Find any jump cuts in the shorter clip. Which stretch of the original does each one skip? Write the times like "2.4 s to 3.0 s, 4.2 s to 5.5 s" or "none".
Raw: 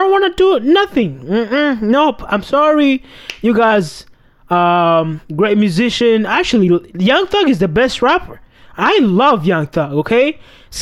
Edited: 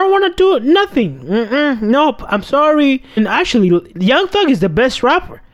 3.2 s to 6.2 s